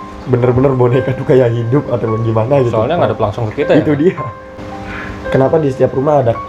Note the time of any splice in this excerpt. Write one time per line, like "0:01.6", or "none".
0:04.6